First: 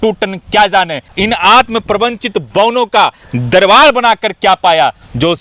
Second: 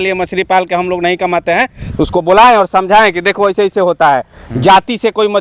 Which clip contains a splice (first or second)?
first